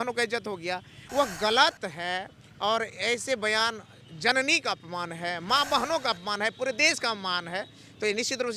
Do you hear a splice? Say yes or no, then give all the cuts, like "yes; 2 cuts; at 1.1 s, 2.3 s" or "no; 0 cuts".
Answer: yes; 1 cut; at 0.9 s